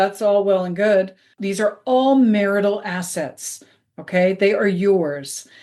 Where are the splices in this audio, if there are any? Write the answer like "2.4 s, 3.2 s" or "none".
1.3 s

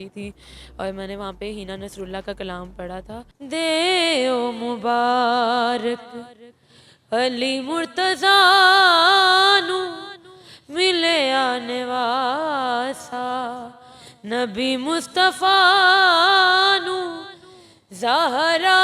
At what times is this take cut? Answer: 3.3 s

